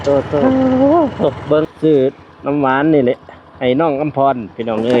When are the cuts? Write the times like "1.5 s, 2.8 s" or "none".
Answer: 1.7 s